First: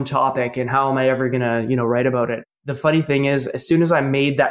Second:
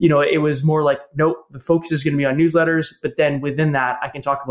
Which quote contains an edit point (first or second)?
first